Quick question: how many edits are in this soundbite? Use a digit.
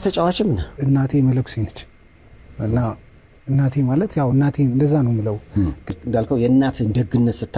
2